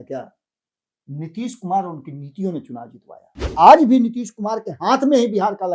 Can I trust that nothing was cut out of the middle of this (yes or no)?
no